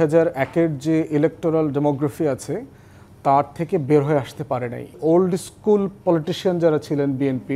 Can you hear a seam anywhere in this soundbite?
yes; 1 cut; at 5.0 s

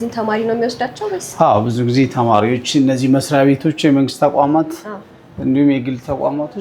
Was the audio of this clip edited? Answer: no; 0 cuts

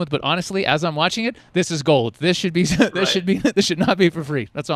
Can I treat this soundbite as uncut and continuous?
yes; 0 cuts

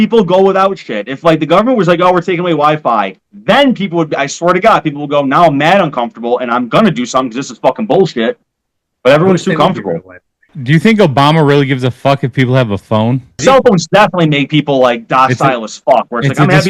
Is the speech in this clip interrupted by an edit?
yes; 2 cuts; at 10.5 s, 13.4 s

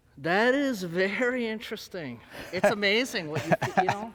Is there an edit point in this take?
no; 0 cuts

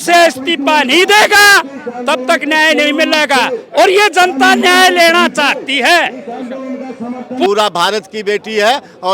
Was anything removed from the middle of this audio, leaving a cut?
yes; 1 cut; at 7.5 s

